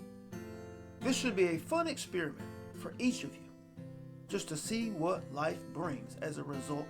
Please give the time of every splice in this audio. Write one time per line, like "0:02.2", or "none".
0:01.0